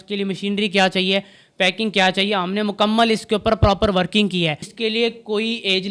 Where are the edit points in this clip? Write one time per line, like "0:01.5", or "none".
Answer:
0:04.7